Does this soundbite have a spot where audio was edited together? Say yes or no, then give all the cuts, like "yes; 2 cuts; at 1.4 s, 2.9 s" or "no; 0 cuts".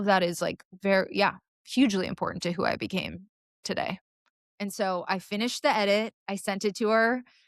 yes; 1 cut; at 4.4 s